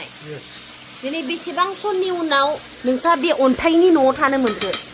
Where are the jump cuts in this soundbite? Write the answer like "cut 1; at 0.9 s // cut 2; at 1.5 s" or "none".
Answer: none